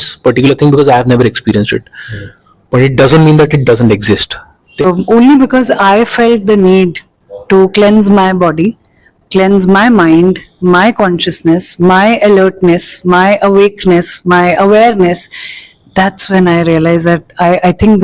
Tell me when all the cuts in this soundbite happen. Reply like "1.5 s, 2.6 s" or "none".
4.8 s